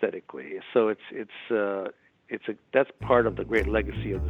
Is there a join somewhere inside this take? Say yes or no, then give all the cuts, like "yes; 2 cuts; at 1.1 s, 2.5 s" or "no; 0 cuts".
no; 0 cuts